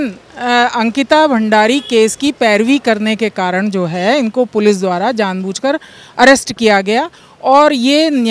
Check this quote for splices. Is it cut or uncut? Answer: uncut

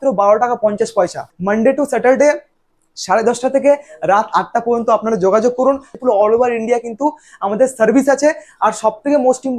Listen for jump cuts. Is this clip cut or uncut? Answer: cut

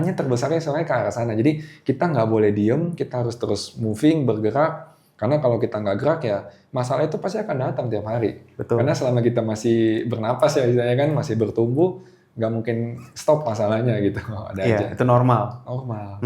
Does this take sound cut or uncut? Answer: uncut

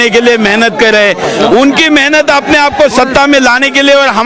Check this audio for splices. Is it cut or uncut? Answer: uncut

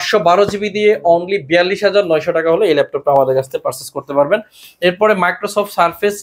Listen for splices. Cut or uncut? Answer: uncut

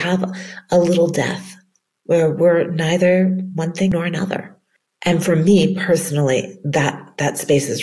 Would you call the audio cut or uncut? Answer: cut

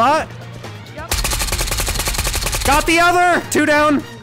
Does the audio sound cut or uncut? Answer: uncut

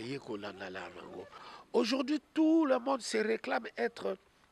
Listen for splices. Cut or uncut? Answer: cut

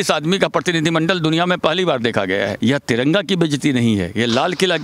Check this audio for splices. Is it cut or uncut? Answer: cut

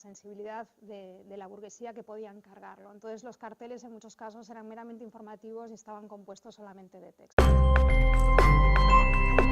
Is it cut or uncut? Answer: uncut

